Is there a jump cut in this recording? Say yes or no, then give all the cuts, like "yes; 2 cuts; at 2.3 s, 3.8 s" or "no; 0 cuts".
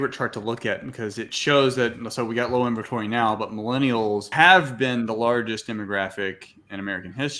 yes; 2 cuts; at 1.3 s, 4.3 s